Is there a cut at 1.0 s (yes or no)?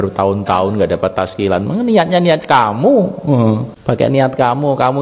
no